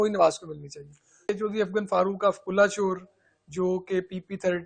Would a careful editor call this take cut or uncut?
cut